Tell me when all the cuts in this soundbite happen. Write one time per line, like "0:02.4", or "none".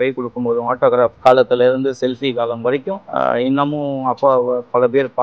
0:01.2
0:03.0